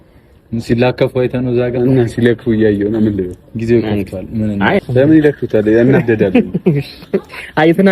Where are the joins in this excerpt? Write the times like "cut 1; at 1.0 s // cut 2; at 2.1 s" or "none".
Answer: cut 1; at 4.8 s